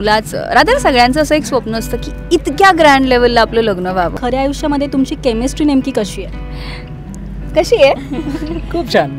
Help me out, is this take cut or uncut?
cut